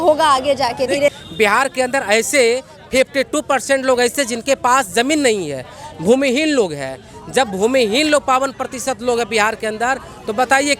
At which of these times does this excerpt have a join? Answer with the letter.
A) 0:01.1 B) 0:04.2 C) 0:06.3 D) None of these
A